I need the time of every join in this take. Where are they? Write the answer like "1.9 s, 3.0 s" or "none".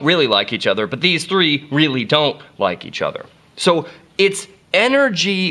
2.5 s

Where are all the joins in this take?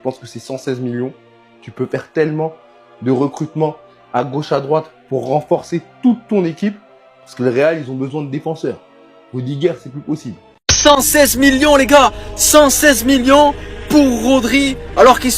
10.6 s

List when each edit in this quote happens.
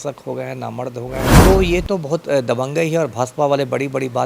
1.4 s

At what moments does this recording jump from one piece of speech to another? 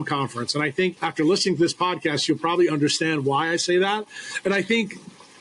1.0 s

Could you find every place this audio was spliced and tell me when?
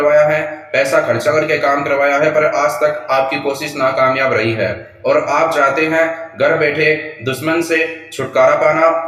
none

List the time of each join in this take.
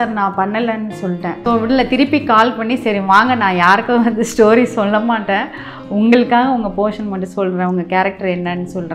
1.4 s

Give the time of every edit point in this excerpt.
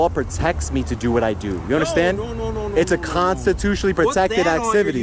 none

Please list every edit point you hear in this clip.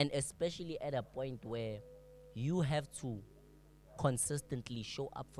none

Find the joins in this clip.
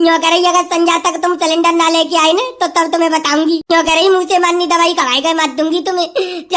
3.6 s

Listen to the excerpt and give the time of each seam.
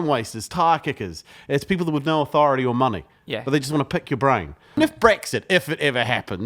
4.8 s

